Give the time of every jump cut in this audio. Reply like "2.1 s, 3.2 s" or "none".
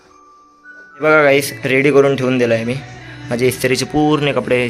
1.0 s